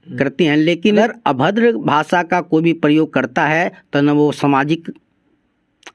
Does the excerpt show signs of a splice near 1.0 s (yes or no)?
yes